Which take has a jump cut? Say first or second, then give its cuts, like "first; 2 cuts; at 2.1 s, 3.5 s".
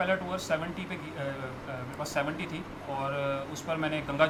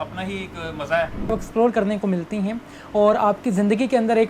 second; 1 cut; at 1.3 s